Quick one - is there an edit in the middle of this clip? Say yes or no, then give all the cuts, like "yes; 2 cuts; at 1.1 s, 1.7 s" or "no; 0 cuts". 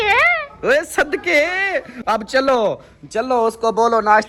no; 0 cuts